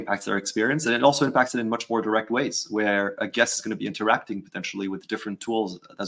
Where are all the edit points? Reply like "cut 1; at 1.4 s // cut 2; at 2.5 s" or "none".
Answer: none

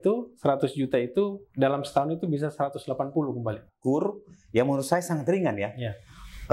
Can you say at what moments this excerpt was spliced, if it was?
cut 1; at 3.7 s

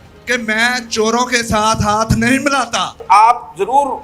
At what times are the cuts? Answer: cut 1; at 2.9 s

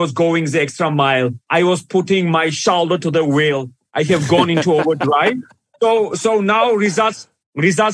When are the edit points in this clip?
cut 1; at 1.4 s

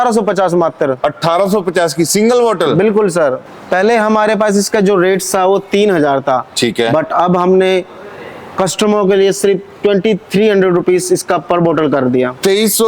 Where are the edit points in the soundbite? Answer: cut 1; at 3.5 s

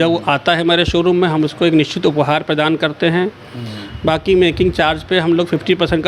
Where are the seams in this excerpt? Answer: none

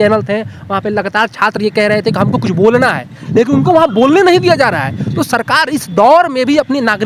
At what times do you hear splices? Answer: none

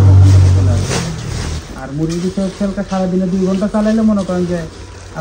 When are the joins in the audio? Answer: cut 1; at 1.5 s

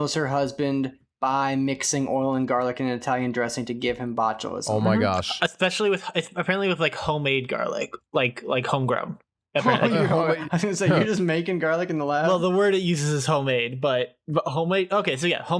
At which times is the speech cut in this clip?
none

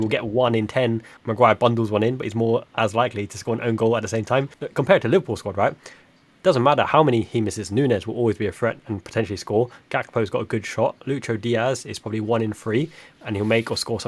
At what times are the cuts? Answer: cut 1; at 1.2 s // cut 2; at 4.6 s

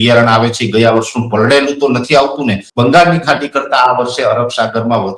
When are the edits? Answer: cut 1; at 2.7 s

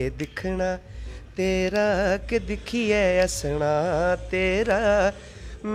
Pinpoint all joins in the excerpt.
none

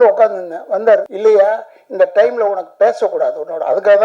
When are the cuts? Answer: cut 1; at 1.1 s

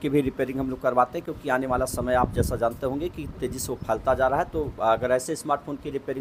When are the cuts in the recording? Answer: none

